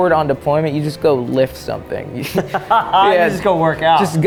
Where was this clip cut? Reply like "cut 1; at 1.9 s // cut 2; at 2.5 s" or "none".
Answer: none